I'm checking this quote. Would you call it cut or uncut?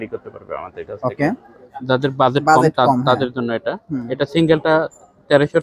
cut